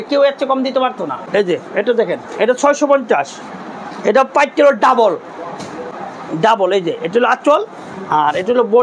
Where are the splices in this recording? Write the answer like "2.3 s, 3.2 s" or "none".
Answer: none